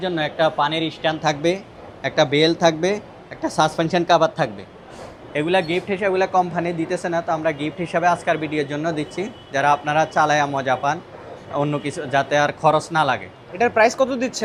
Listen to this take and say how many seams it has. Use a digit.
0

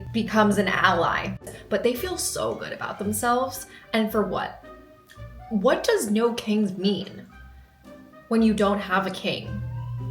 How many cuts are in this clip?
1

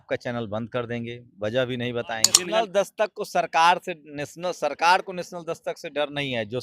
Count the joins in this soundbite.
1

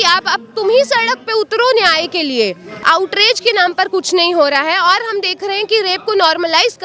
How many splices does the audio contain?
1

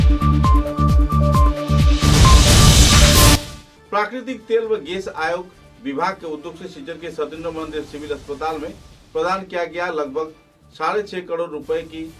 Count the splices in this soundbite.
1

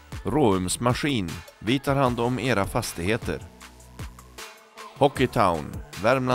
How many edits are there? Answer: 0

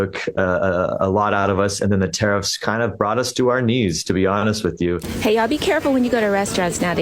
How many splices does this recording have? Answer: 1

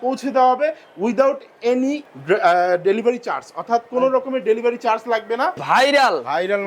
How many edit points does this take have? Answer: 2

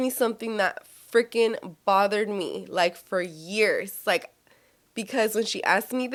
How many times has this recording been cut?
0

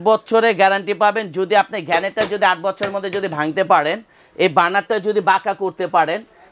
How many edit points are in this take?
0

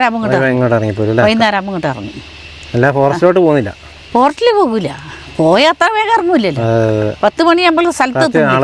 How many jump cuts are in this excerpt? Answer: 0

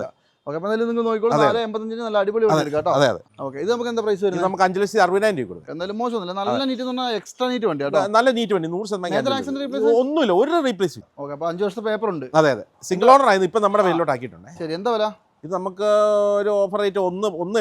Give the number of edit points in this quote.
3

